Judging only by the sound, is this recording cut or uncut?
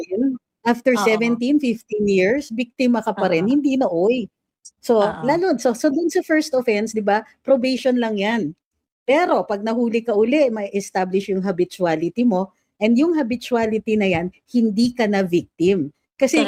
uncut